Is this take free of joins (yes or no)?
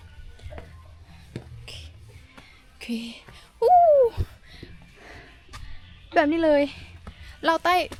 yes